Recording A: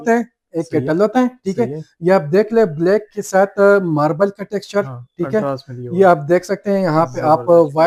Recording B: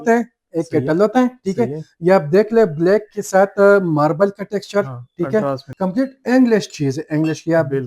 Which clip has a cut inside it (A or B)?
B